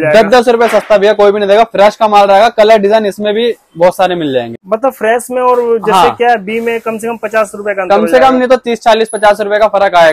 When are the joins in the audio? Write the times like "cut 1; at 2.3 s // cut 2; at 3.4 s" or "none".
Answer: cut 1; at 4.6 s